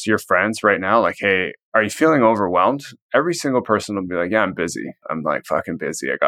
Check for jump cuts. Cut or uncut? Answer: cut